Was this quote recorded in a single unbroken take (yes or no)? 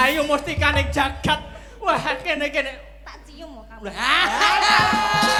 yes